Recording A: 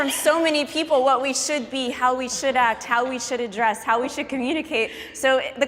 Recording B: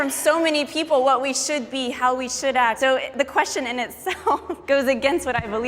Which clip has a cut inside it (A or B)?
B